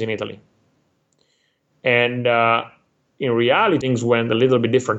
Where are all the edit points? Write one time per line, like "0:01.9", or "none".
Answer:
0:03.8